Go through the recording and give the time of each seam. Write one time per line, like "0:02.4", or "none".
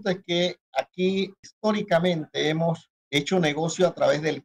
0:01.4
0:02.9